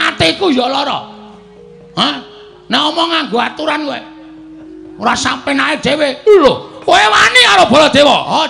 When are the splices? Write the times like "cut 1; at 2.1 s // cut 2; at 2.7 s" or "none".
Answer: none